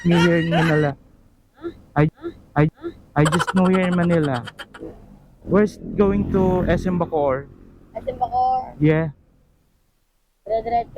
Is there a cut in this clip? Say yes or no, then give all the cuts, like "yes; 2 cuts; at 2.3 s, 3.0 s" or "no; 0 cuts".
no; 0 cuts